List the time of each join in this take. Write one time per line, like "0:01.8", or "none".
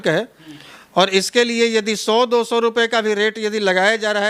none